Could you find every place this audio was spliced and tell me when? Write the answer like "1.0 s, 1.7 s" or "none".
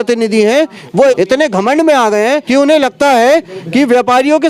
1.2 s, 2.4 s